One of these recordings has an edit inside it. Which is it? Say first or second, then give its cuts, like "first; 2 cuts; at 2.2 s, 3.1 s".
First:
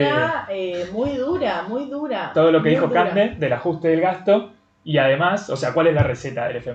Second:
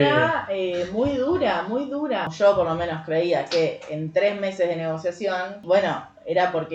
second; 2 cuts; at 2.2 s, 5.6 s